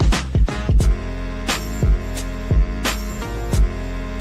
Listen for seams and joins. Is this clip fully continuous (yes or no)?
no